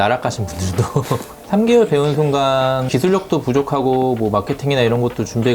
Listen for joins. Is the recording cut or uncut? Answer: cut